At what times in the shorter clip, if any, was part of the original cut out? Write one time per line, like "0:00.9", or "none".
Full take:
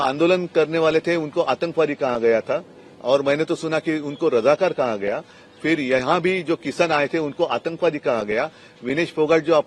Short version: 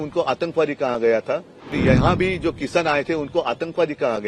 0:01.8

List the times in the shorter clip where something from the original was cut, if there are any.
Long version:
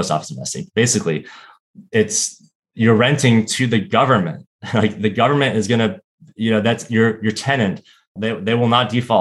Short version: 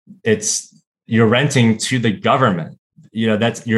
0:02.9

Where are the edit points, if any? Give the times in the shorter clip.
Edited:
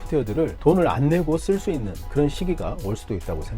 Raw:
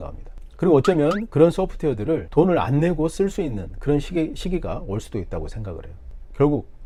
0:02.4

